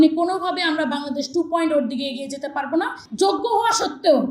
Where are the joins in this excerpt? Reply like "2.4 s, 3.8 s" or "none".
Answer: 3.0 s